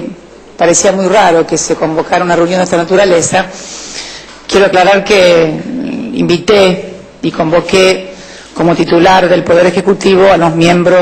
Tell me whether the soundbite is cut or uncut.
cut